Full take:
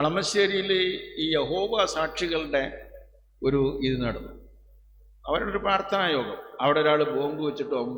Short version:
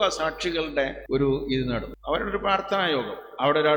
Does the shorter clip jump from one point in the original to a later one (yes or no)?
yes